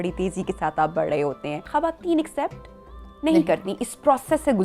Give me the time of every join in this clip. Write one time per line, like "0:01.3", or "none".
0:01.7